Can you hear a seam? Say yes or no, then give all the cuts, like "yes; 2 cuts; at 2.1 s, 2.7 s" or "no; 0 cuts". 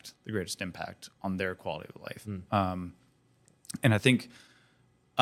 no; 0 cuts